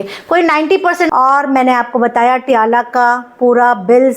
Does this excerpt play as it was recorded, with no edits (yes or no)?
no